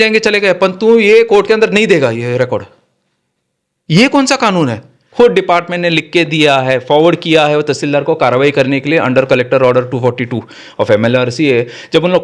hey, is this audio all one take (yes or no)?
no